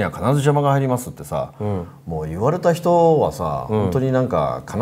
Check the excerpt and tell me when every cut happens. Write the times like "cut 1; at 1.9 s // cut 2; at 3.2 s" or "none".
none